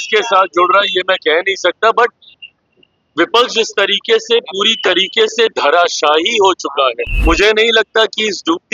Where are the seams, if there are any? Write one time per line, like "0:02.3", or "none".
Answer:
0:07.1